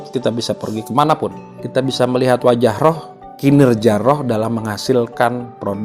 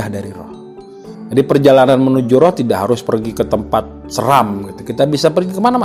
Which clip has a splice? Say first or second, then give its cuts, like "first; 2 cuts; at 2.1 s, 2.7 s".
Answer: first; 1 cut; at 1.6 s